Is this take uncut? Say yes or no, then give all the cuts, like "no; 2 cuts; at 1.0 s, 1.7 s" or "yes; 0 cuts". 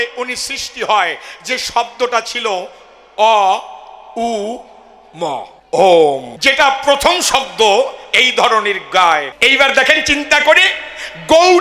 no; 3 cuts; at 5.5 s, 6.3 s, 9.3 s